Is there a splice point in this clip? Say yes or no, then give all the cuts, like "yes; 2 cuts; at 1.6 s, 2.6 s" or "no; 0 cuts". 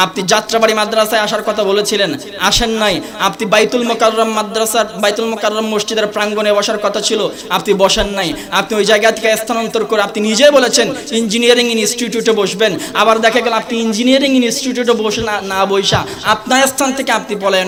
no; 0 cuts